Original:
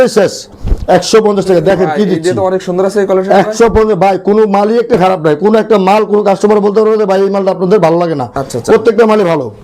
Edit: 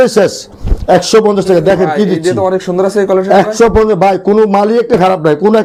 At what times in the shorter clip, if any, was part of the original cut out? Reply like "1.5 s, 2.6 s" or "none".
none